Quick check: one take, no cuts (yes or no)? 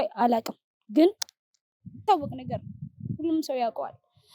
no